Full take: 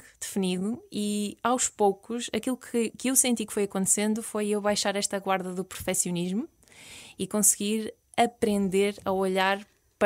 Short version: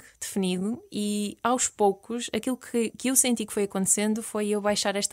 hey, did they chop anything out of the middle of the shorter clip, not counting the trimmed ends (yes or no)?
no